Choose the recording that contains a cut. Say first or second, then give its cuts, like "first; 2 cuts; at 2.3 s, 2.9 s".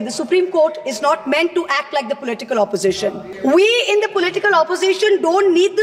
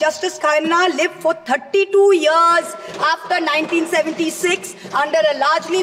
first; 1 cut; at 3.3 s